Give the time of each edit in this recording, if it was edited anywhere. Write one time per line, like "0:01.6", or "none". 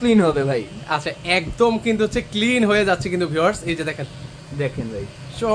none